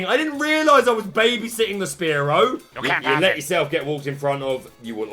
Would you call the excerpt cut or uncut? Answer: cut